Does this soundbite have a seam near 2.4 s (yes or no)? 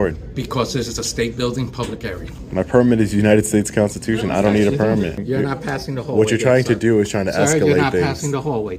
yes